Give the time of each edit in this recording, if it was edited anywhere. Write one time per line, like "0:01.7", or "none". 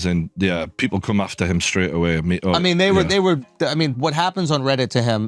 none